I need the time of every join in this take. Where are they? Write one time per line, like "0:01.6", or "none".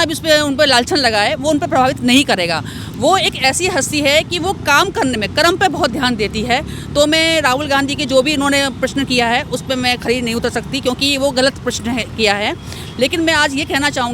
none